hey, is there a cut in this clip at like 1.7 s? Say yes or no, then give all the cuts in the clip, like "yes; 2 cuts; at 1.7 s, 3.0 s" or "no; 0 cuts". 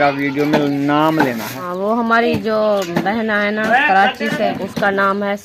yes; 2 cuts; at 1.7 s, 4.5 s